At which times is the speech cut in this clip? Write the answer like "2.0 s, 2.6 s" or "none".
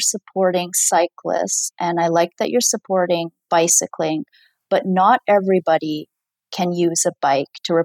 none